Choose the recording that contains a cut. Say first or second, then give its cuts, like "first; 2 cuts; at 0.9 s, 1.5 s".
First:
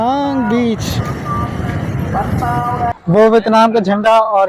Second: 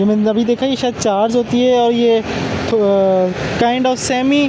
first; 1 cut; at 2.9 s